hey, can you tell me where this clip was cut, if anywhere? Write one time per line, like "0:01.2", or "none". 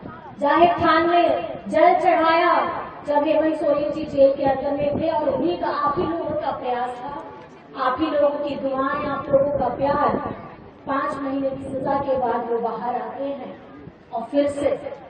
none